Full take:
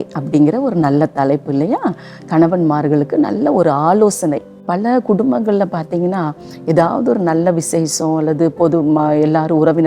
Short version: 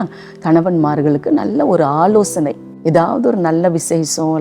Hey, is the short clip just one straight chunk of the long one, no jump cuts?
no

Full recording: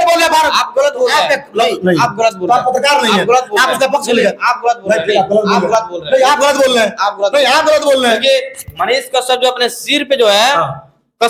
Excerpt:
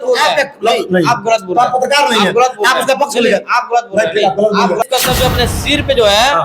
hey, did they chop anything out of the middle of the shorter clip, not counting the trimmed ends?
yes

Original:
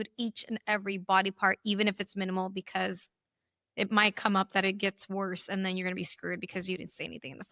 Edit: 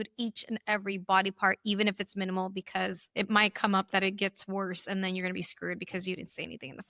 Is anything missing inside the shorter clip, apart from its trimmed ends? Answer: yes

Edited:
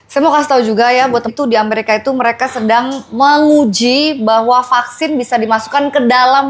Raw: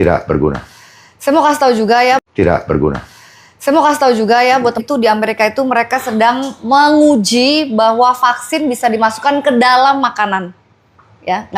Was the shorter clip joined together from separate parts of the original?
yes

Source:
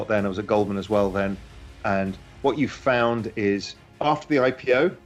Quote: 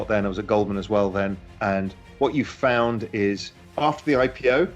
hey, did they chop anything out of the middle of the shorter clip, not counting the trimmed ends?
yes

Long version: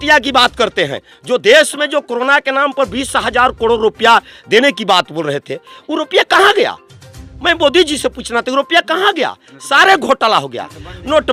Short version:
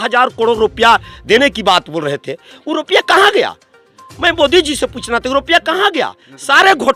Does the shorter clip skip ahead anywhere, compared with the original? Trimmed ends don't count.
no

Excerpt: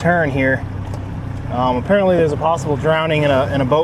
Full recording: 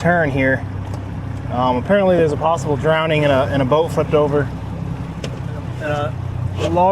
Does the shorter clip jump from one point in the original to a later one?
no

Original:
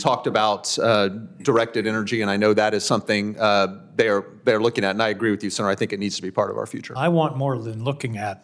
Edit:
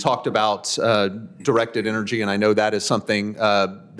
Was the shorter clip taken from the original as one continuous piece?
yes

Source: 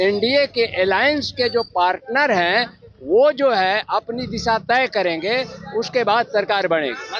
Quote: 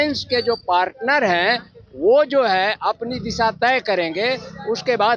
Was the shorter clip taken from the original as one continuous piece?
yes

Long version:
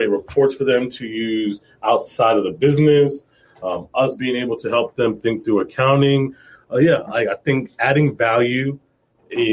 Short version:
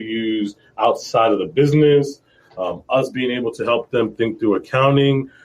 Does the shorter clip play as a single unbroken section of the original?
yes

